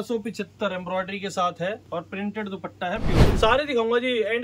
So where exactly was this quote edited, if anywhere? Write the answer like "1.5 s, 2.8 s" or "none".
1.8 s, 3.3 s